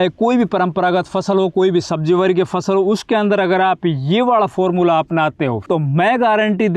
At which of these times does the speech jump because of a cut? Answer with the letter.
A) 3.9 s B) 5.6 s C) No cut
B